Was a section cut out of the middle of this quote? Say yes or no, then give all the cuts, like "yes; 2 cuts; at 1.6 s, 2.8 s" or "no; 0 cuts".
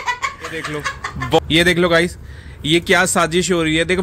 yes; 1 cut; at 1.4 s